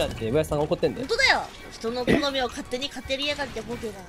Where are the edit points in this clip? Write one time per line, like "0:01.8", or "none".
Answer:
none